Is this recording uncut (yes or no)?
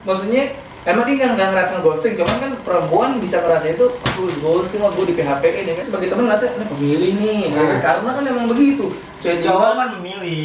no